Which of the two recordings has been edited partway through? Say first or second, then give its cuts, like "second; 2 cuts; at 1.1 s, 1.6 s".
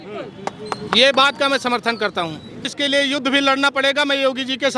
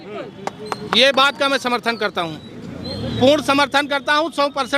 first; 1 cut; at 2.7 s